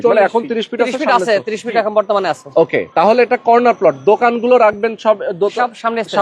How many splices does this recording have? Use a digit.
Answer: 1